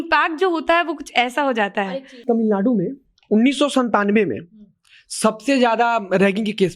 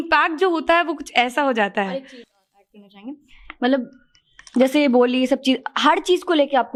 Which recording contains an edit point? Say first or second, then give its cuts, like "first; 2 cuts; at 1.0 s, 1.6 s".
first; 1 cut; at 2.2 s